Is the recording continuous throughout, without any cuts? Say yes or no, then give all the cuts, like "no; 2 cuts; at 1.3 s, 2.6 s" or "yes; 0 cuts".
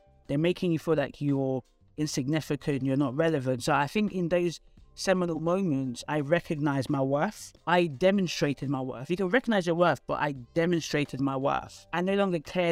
no; 1 cut; at 7.5 s